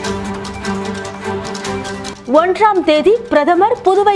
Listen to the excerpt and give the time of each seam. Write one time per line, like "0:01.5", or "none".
0:02.1